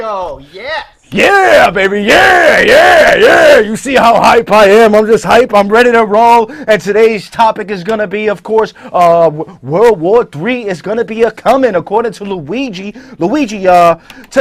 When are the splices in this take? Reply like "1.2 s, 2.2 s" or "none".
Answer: none